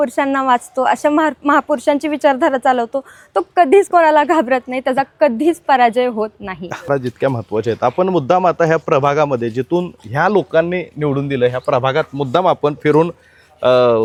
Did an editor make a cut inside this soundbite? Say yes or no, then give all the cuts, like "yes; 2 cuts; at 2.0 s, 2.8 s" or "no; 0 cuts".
no; 0 cuts